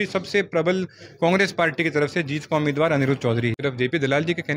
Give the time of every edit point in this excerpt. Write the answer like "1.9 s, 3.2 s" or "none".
3.6 s